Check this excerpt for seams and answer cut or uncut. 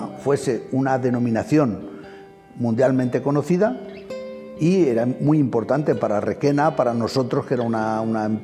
uncut